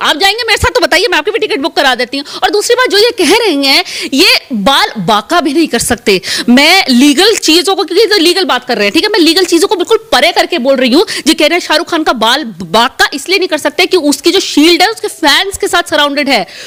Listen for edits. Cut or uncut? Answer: uncut